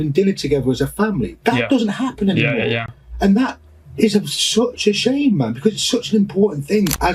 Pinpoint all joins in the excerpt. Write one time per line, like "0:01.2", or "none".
none

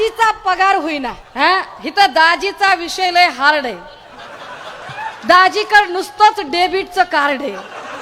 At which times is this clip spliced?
0:01.2

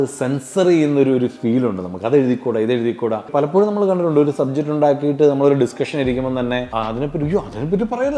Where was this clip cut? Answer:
0:03.3
0:06.7

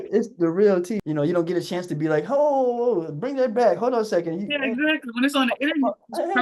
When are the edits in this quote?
0:01.0

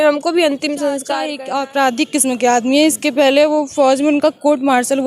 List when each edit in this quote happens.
0:01.1

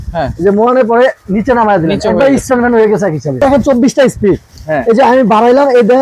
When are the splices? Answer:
0:03.4

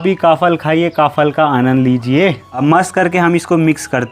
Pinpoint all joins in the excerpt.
0:02.5

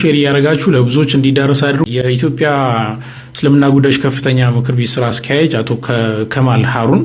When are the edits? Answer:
0:01.9

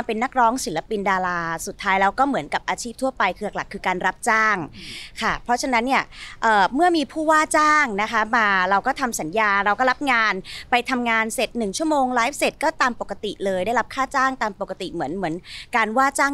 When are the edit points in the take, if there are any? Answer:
none

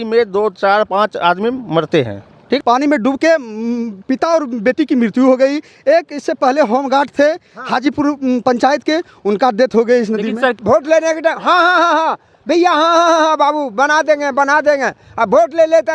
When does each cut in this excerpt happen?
0:02.6
0:10.5

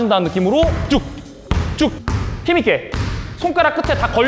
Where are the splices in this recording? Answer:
none

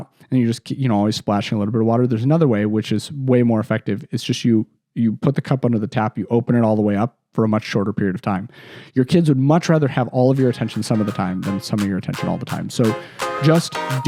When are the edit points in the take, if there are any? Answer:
none

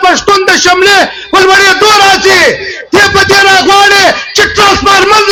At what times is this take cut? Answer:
none

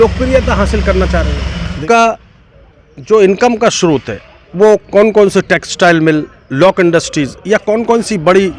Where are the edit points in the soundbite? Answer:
0:01.8

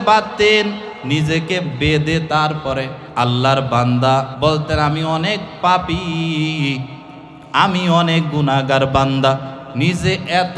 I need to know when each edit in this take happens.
0:00.9
0:03.0
0:04.3
0:09.6

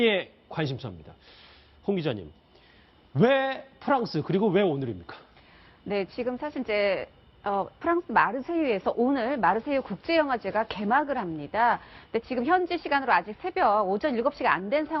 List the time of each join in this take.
none

